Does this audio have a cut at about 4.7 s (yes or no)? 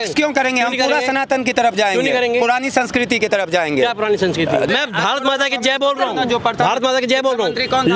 yes